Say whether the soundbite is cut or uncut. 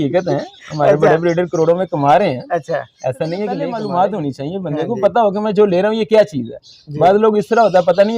cut